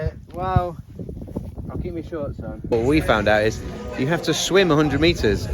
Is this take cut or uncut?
cut